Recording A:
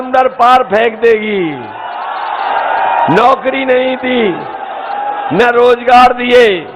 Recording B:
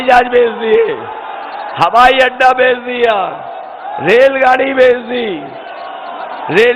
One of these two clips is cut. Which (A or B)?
A